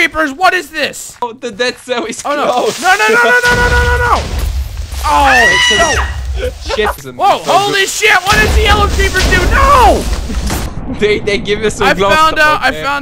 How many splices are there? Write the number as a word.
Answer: two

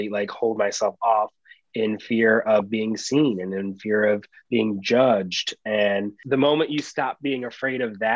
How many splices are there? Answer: one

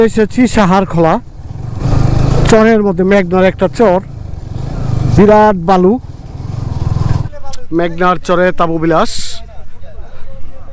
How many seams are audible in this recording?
two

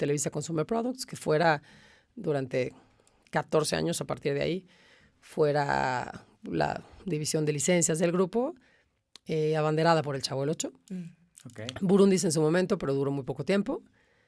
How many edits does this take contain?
zero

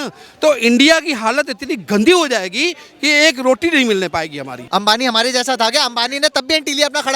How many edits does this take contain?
one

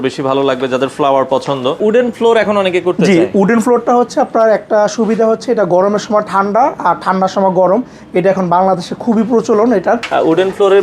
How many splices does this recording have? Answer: two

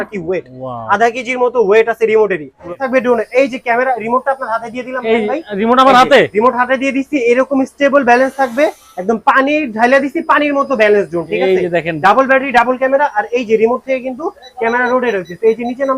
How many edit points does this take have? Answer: one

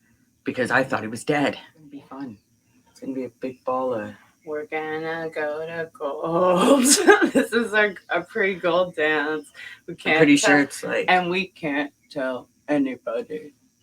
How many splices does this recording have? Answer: one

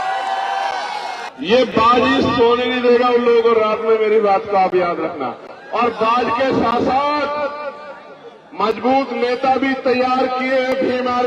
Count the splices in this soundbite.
one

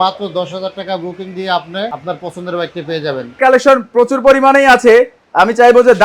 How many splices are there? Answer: two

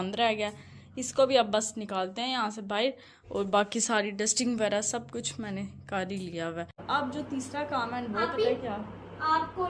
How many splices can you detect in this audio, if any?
one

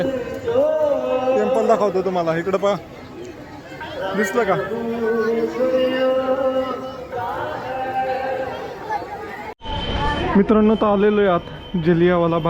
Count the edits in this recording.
one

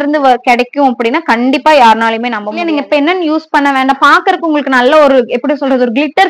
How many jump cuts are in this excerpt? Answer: one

